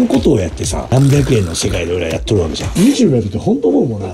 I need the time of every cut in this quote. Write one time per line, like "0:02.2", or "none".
0:00.9
0:02.7